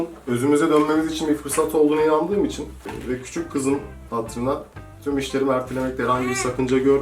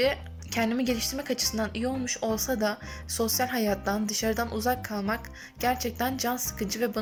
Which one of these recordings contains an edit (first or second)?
first